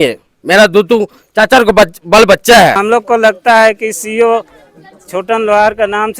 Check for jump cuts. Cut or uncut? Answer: cut